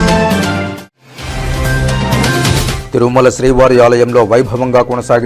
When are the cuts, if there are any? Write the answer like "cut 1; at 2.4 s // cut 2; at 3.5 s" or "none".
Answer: cut 1; at 0.9 s // cut 2; at 2.8 s